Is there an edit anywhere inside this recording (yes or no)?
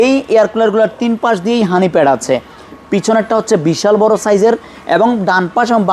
no